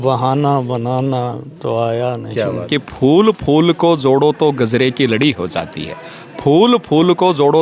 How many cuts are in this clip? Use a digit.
1